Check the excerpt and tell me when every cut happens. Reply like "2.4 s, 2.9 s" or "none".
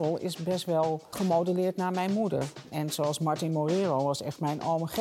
1.1 s, 2.7 s